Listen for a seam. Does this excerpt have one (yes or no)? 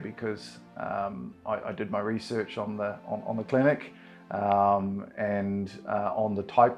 no